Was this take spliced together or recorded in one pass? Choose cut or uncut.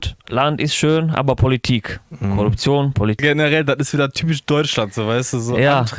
cut